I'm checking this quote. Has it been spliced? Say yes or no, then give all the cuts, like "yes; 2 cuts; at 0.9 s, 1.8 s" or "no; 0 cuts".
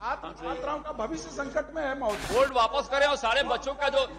yes; 1 cut; at 2.2 s